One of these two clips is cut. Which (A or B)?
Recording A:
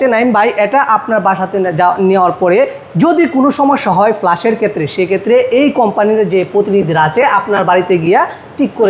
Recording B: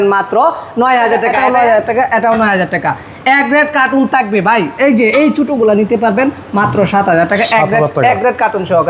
B